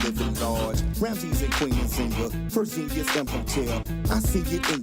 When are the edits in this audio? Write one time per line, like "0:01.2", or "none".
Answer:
none